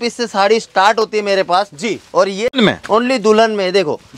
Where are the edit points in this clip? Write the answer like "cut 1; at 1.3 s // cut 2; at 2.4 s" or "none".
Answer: cut 1; at 2.5 s